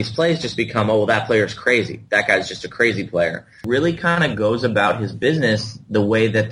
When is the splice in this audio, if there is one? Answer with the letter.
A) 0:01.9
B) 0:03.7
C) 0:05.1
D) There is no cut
B